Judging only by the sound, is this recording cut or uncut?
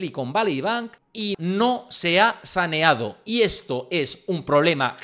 cut